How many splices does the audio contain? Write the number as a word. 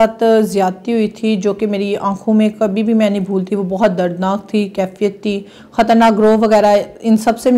one